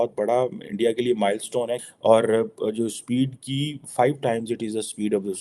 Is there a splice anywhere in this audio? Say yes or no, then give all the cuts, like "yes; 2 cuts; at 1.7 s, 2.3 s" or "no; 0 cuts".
yes; 1 cut; at 1.8 s